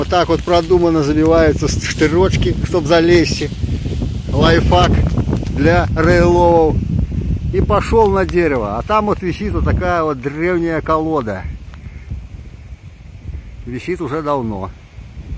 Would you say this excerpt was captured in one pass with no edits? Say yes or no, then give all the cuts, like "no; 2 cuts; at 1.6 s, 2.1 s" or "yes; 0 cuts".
no; 1 cut; at 12.1 s